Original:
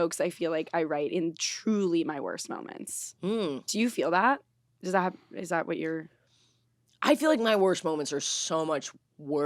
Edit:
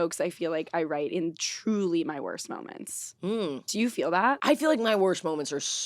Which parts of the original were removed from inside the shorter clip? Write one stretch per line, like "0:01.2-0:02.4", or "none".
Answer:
0:04.4-0:07.0